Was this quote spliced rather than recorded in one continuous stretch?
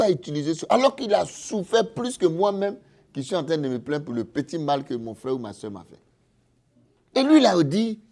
no; 0 cuts

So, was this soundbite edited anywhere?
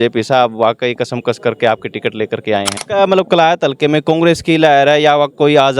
yes; 1 cut; at 2.8 s

